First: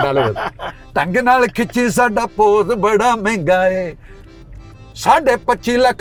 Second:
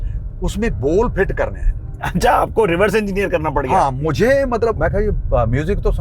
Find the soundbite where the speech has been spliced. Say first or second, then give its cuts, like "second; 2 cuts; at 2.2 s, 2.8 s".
second; 1 cut; at 4.8 s